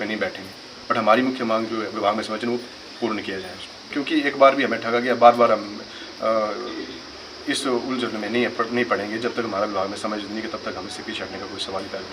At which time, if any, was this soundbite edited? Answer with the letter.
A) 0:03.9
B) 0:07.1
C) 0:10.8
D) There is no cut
A